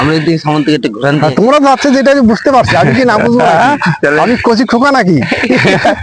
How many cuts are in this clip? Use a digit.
0